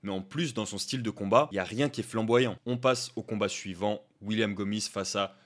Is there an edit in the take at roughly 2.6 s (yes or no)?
yes